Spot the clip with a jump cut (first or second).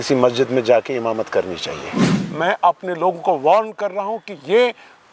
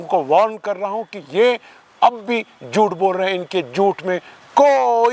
first